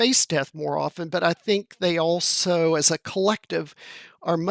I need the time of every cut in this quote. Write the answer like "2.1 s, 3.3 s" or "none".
none

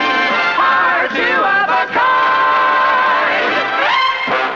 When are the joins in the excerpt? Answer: 0.9 s

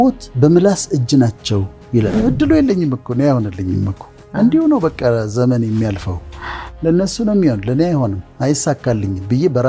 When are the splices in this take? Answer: 2.1 s

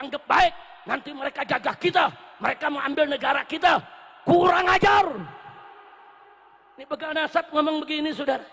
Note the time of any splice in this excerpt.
none

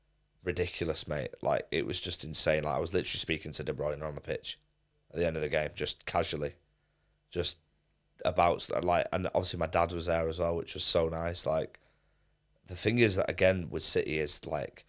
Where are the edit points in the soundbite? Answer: none

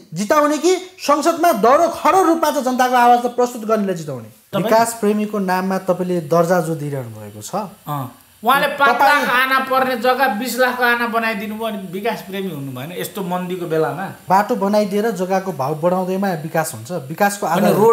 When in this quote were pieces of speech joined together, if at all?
4.5 s, 14.2 s

